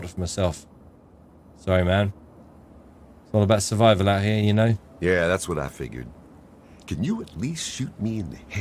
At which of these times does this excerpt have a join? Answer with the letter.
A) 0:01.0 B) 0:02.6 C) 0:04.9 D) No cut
C